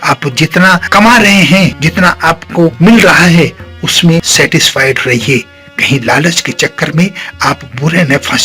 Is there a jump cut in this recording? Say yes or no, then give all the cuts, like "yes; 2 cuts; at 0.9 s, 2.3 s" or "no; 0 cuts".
yes; 2 cuts; at 1.8 s, 4.3 s